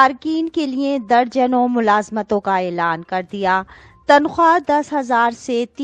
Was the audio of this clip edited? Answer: no; 0 cuts

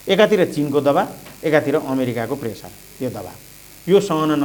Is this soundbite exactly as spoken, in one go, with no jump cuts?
yes; 0 cuts

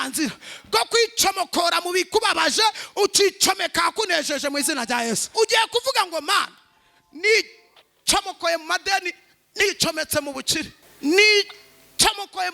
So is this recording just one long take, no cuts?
no; 2 cuts; at 5.3 s, 10.8 s

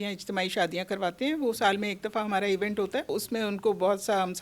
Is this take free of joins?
no; 1 cut; at 3.1 s

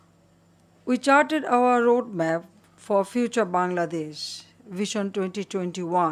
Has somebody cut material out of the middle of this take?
yes; 1 cut; at 5.0 s

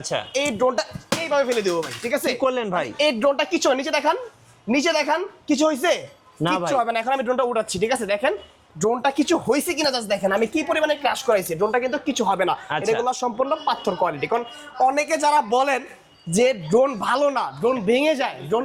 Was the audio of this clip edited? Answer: no; 0 cuts

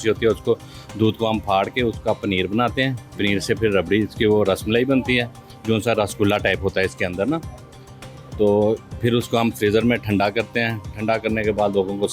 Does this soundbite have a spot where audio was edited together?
no; 0 cuts

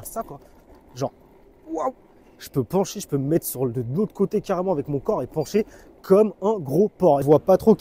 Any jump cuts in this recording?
no; 0 cuts

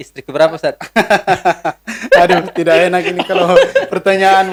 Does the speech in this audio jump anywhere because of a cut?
no; 0 cuts

